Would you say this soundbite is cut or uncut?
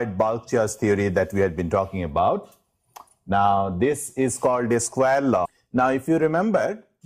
uncut